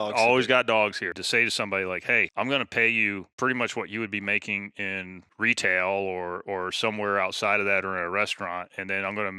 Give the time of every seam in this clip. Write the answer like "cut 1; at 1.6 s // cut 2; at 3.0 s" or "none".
cut 1; at 1.1 s // cut 2; at 2.3 s // cut 3; at 3.3 s // cut 4; at 5.2 s